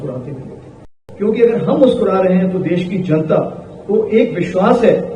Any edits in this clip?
yes; 1 cut; at 1.0 s

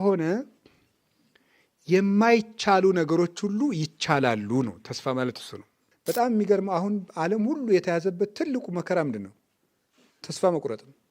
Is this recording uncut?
no; 1 cut; at 5.9 s

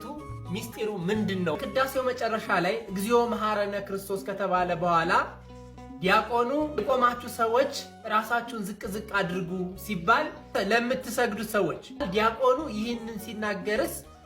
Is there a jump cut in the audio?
yes; 1 cut; at 1.6 s

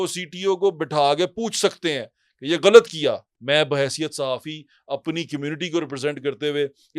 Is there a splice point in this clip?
yes; 1 cut; at 3.3 s

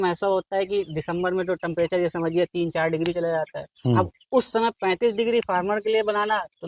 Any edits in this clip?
no; 0 cuts

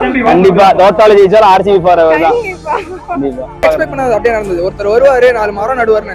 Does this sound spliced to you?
yes; 1 cut; at 3.6 s

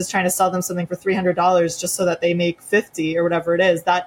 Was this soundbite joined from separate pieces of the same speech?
no; 0 cuts

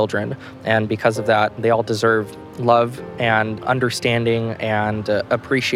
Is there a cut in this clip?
no; 0 cuts

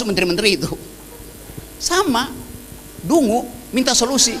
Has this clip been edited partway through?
no; 0 cuts

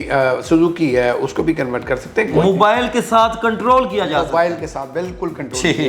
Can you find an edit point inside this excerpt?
yes; 1 cut; at 2.4 s

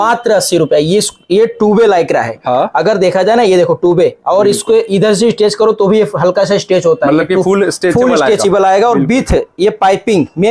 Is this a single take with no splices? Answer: yes; 0 cuts

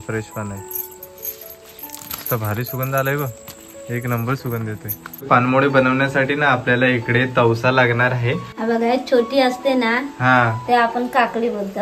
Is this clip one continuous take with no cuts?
no; 2 cuts; at 5.3 s, 8.5 s

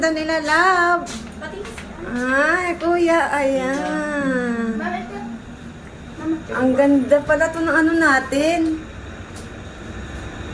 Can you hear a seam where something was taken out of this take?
yes; 1 cut; at 6.5 s

